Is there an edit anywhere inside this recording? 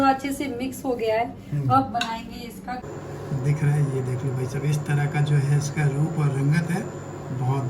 yes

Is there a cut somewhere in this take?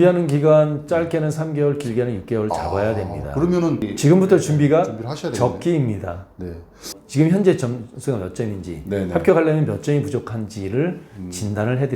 yes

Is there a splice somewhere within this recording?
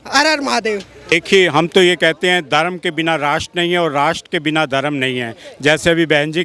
yes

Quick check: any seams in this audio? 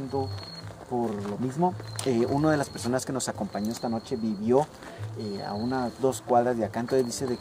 no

